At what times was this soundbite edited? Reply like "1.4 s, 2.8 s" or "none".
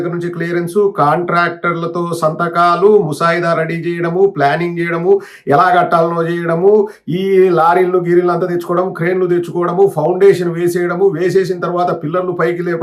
none